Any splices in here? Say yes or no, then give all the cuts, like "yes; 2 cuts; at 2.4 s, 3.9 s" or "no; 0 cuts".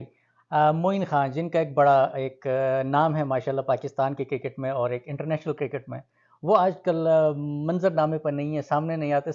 no; 0 cuts